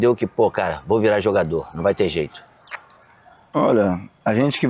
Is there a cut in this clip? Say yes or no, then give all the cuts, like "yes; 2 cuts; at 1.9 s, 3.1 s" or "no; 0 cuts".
no; 0 cuts